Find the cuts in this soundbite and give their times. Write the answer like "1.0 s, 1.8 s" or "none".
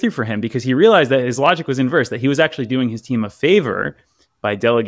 none

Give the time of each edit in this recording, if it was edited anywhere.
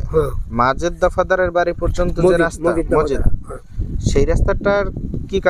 none

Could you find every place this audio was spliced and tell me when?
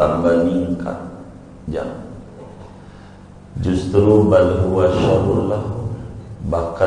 none

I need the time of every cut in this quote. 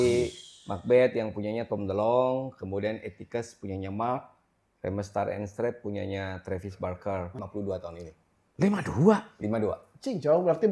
7.4 s

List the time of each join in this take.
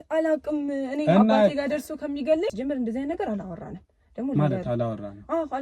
2.5 s

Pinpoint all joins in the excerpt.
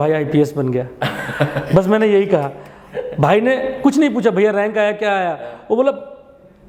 none

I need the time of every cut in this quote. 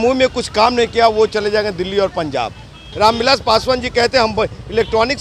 2.8 s

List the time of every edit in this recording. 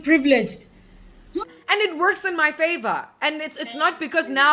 1.4 s

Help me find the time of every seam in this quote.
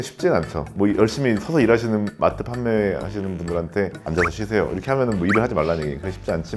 none

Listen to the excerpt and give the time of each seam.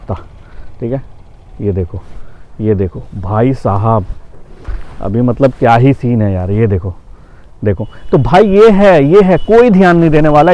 none

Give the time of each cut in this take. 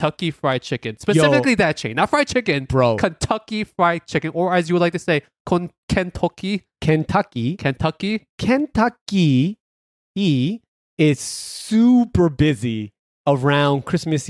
none

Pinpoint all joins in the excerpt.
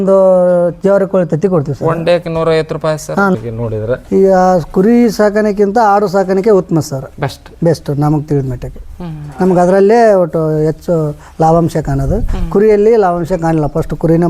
3.4 s

